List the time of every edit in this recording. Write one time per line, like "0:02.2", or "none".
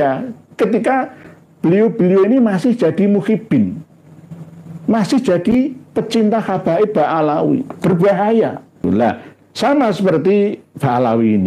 0:08.8